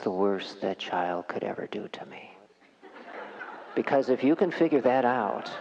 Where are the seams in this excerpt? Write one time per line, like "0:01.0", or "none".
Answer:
0:03.1